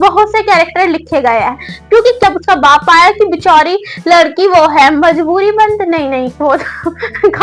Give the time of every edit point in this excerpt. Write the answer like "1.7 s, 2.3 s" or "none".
2.2 s